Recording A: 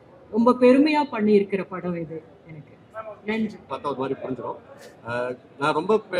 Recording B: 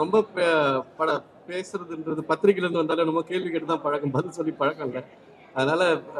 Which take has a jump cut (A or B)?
A